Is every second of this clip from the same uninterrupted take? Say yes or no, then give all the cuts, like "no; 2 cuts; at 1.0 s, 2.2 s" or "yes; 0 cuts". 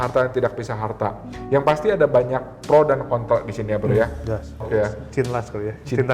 no; 1 cut; at 4.7 s